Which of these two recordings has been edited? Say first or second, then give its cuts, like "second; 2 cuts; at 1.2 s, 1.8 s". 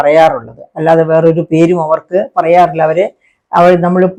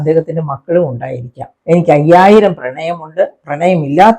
second; 1 cut; at 1.5 s